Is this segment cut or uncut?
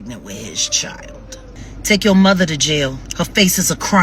cut